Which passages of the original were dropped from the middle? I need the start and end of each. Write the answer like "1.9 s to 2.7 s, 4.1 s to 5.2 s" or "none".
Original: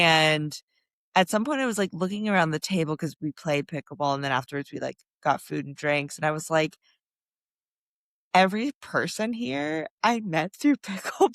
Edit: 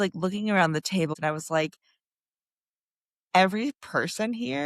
2.9 s to 6.1 s